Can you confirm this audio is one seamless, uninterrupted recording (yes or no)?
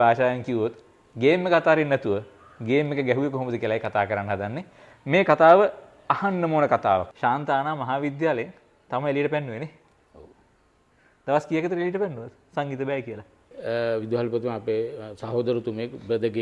no